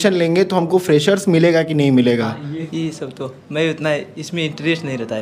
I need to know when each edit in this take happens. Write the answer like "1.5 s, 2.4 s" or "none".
2.6 s